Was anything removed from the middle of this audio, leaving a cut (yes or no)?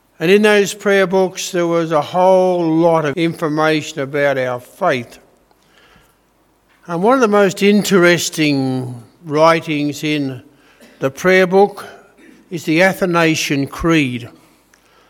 yes